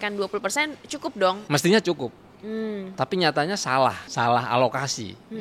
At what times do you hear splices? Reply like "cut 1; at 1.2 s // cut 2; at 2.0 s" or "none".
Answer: cut 1; at 1.4 s // cut 2; at 4.1 s